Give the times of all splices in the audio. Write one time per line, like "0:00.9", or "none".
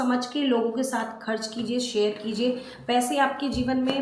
none